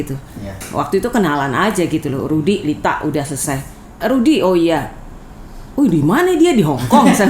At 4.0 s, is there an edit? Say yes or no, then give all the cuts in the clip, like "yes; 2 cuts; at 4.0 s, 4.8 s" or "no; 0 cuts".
yes; 1 cut; at 4.0 s